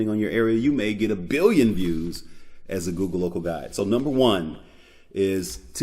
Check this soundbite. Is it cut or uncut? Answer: uncut